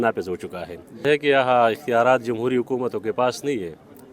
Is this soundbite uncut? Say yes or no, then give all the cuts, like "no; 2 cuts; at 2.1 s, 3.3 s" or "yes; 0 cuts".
no; 1 cut; at 1.0 s